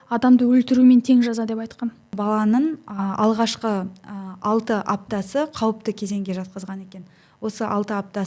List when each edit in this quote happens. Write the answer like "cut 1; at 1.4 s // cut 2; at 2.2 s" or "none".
cut 1; at 2.1 s

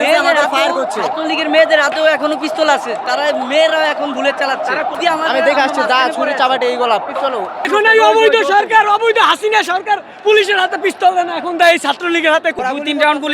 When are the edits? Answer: cut 1; at 4.9 s // cut 2; at 7.7 s // cut 3; at 12.6 s

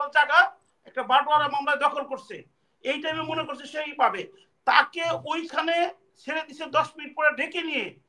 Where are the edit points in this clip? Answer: none

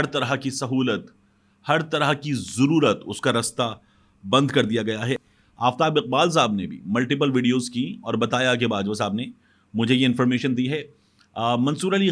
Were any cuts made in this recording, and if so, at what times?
cut 1; at 5.3 s

